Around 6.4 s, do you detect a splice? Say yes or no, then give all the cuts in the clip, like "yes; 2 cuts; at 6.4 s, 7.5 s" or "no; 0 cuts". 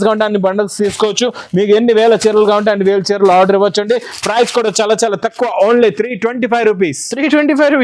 no; 0 cuts